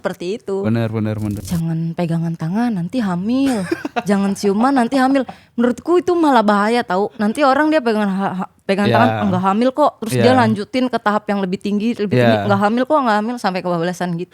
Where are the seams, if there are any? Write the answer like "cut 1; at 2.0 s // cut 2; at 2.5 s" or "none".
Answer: cut 1; at 1.4 s